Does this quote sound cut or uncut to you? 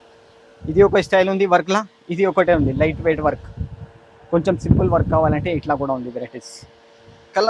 uncut